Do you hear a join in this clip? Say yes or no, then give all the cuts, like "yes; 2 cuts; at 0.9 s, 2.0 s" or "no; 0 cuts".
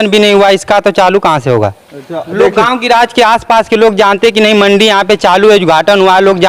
no; 0 cuts